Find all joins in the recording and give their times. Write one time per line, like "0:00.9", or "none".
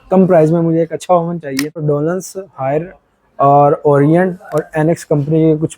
0:01.8

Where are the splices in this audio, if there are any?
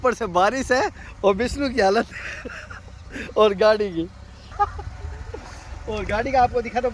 0:04.4

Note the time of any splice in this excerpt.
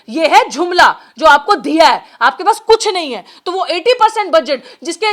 none

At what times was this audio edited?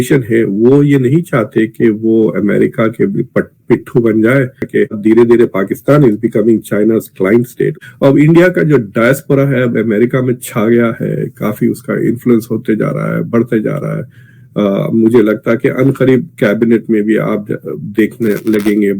0:04.6
0:07.8

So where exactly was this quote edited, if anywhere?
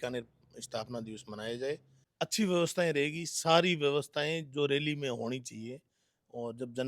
0:02.0

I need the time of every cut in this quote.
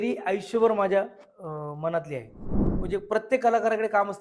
0:02.6

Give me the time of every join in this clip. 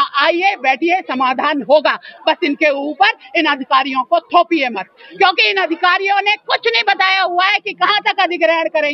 none

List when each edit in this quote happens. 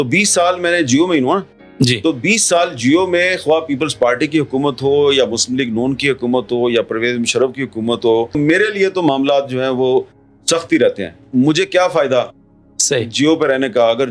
none

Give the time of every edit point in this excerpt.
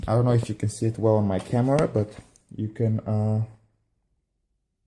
0:03.5

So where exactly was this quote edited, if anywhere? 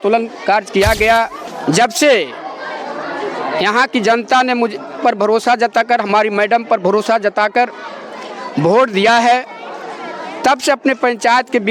0:01.5

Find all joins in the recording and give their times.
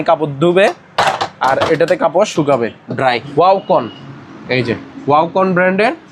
0:03.2

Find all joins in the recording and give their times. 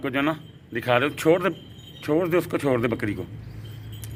none

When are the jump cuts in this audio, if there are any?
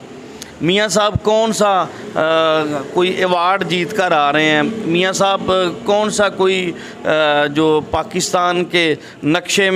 none

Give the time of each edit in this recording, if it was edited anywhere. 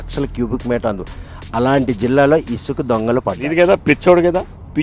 0:03.4

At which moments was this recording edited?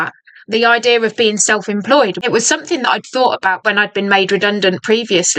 0:02.2
0:03.6

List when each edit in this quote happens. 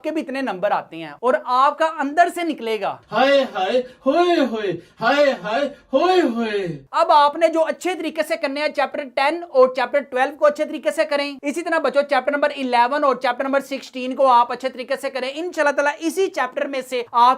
0:01.1
0:06.8

